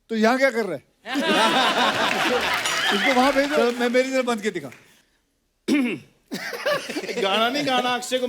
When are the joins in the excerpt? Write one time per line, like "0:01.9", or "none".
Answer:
0:03.6